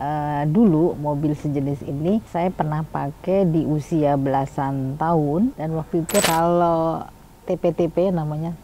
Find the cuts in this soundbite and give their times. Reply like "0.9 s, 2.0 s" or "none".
6.2 s